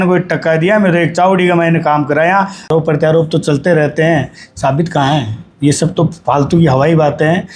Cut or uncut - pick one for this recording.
cut